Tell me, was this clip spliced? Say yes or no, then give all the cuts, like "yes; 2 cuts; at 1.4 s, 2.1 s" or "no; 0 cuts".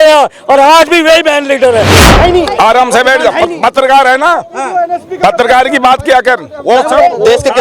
yes; 1 cut; at 2.0 s